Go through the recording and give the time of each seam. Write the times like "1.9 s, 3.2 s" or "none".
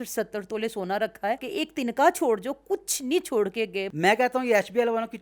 1.5 s, 3.9 s